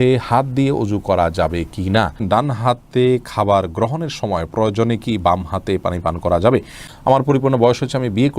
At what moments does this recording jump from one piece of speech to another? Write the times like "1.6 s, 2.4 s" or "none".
2.2 s, 6.8 s